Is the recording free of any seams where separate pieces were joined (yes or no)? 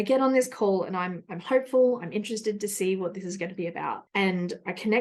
yes